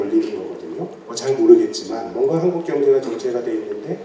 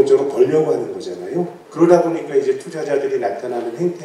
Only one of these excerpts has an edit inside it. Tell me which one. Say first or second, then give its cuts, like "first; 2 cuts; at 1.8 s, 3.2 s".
second; 1 cut; at 1.6 s